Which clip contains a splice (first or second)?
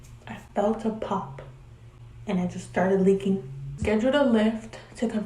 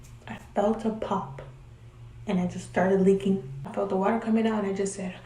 first